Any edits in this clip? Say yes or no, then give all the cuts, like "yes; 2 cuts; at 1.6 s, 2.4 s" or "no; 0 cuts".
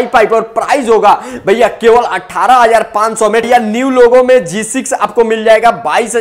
yes; 1 cut; at 3.5 s